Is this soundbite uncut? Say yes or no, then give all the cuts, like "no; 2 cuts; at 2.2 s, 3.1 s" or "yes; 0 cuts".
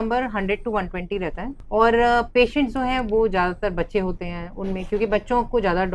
no; 1 cut; at 1.5 s